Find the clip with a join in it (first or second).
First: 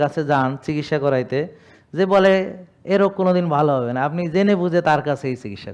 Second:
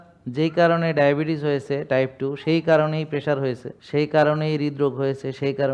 second